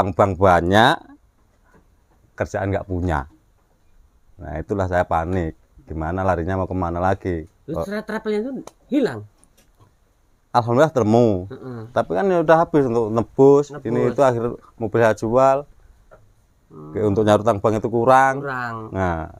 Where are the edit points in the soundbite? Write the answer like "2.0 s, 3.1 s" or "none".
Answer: none